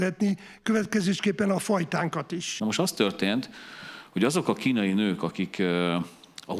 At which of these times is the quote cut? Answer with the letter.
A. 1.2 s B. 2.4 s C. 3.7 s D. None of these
B